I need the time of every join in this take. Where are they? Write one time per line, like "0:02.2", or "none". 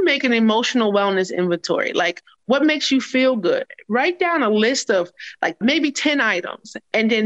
0:02.4
0:05.6